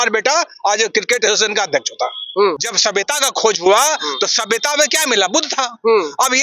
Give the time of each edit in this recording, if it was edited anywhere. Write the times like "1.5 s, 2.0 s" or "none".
2.7 s